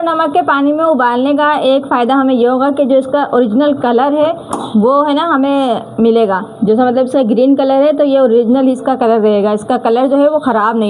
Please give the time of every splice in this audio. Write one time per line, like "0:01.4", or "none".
none